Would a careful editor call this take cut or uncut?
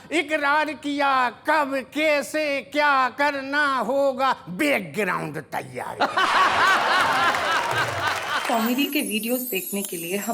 cut